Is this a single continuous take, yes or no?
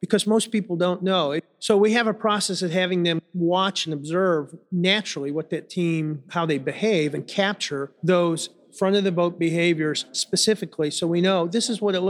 no